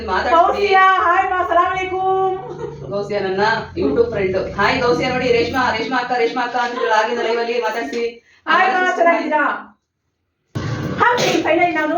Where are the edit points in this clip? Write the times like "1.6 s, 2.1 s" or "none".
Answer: 10.6 s